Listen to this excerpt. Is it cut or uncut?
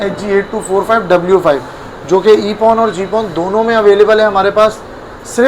uncut